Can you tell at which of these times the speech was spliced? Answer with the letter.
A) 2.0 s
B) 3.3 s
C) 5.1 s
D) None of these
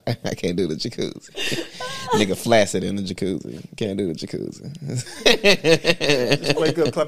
D